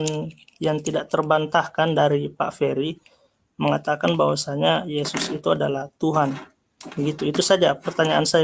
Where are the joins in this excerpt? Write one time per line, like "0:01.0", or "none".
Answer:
none

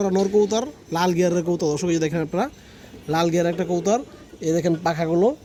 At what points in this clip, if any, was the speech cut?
none

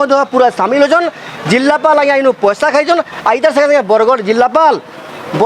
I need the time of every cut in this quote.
none

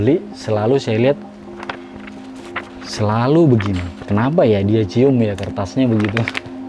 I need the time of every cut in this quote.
none

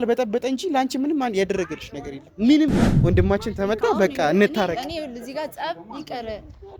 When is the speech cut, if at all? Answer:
0:02.9

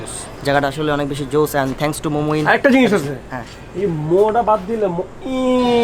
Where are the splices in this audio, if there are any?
none

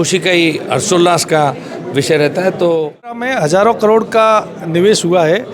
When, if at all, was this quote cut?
0:03.2

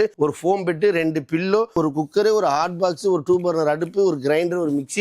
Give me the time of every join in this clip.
0:01.7

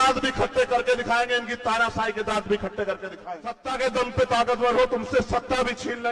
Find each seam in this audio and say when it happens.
0:03.6

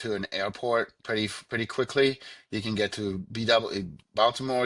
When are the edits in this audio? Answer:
none

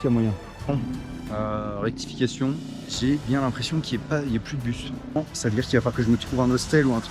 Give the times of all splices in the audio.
0:00.7
0:02.8
0:05.2

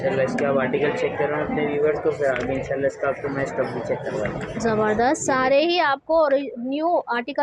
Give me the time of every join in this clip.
none

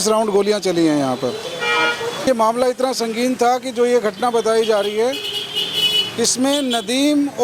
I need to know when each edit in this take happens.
0:02.2

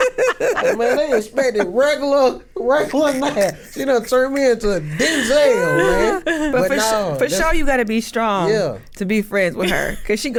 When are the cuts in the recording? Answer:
none

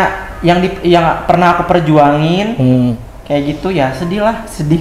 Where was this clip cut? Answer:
none

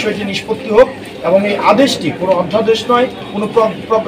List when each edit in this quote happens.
none

